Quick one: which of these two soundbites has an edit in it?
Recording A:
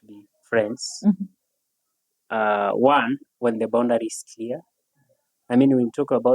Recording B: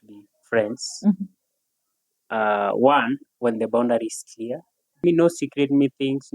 B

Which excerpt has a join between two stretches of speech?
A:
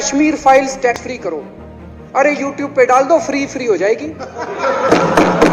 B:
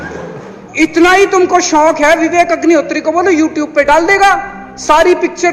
A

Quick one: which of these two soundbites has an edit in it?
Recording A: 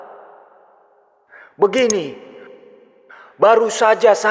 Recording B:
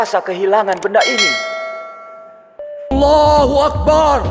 B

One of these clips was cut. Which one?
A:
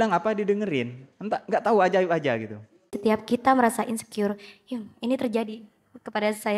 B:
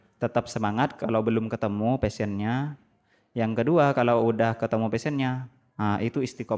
A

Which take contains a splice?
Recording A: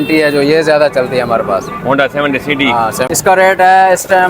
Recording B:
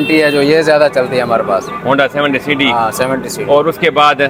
A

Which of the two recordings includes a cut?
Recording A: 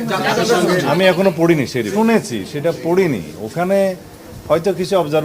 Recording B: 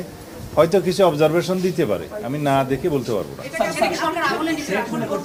A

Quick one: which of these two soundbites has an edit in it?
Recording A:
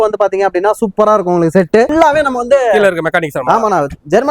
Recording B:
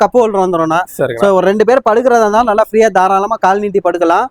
A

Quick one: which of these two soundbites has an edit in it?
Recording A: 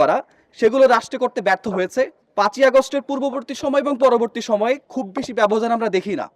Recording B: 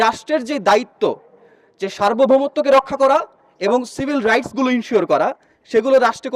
A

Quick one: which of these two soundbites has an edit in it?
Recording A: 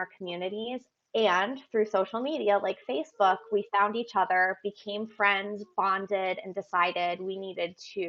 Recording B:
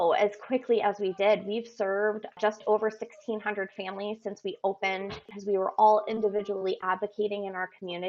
B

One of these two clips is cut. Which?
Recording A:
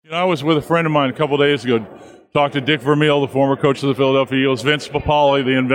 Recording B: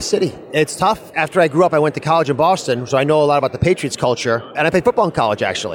B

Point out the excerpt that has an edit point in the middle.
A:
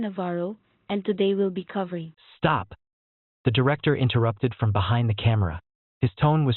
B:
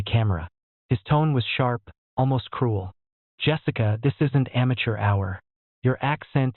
A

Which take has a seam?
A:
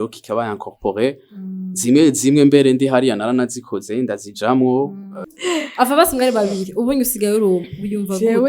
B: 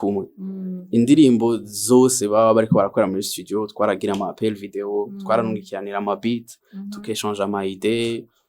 A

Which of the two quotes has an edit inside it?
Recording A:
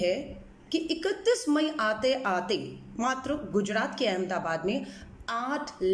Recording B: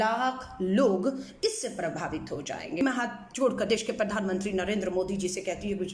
B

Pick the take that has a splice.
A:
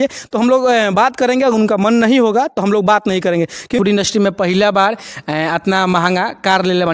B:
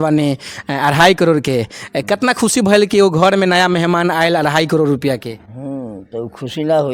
A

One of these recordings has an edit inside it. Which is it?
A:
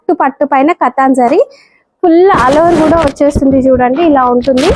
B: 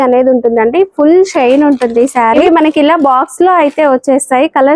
B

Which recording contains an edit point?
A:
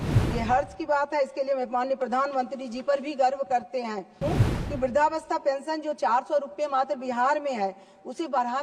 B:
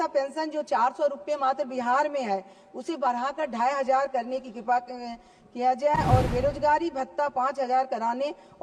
A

